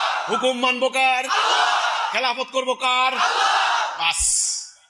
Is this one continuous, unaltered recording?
yes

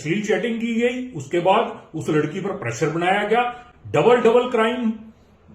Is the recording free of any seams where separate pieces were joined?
yes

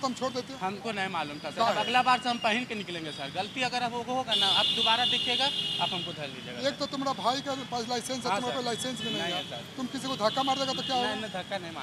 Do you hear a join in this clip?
no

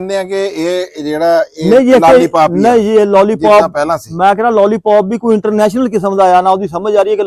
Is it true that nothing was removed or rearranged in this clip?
yes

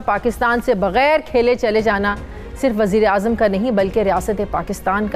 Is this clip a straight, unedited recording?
yes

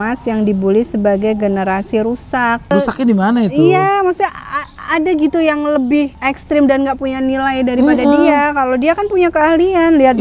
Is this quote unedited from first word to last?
no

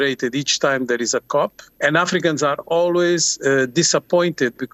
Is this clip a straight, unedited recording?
no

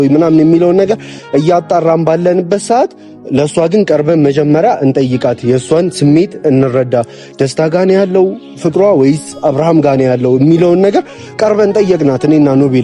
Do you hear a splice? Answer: no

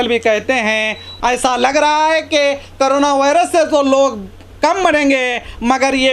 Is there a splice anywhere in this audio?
yes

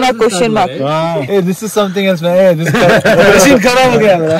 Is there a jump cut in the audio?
yes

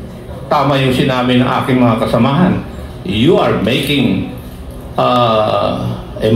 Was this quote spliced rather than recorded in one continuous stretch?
no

